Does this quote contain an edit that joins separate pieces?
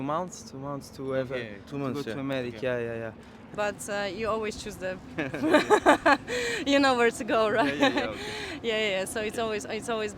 yes; 1 cut; at 3.5 s

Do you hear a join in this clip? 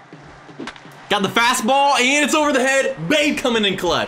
no; 0 cuts

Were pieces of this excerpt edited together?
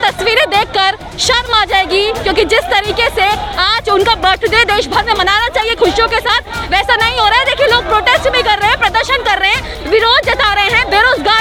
no; 0 cuts

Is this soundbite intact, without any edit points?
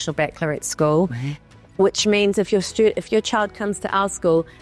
yes; 0 cuts

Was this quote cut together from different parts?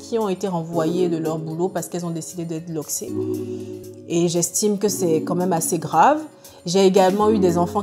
yes; 2 cuts; at 3.1 s, 3.9 s

